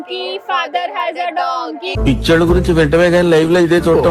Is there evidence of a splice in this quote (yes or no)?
no